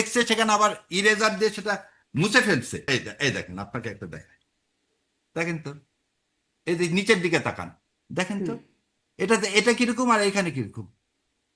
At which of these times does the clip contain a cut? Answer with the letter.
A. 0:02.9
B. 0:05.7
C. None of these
A